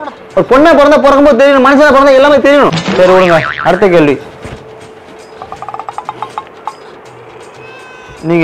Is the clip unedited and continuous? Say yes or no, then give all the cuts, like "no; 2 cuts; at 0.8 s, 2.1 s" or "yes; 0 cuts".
no; 1 cut; at 2.8 s